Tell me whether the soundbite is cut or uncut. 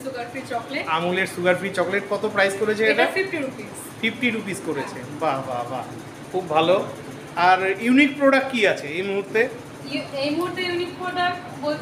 uncut